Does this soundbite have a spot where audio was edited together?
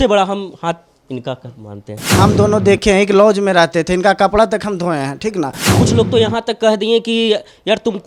yes; 2 cuts; at 2.2 s, 5.6 s

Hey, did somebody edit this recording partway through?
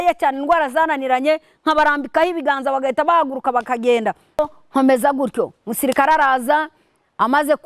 yes; 1 cut; at 4.4 s

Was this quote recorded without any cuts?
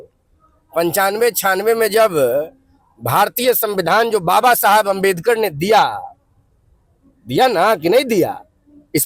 yes; 0 cuts

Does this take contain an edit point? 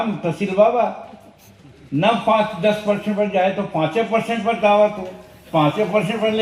no; 0 cuts

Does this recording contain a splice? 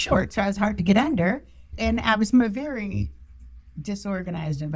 no; 0 cuts

